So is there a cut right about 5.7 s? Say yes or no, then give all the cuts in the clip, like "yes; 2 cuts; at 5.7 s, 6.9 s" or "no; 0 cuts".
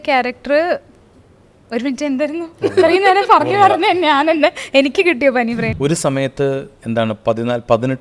yes; 1 cut; at 5.7 s